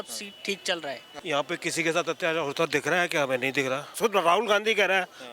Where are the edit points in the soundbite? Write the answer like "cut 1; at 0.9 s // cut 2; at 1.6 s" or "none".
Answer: cut 1; at 1.1 s // cut 2; at 4.0 s